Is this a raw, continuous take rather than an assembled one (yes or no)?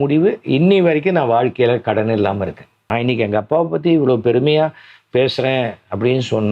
no